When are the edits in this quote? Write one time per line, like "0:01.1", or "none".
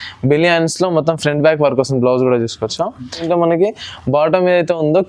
0:03.3